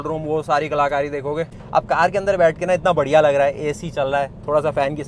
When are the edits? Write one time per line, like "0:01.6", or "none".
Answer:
0:01.6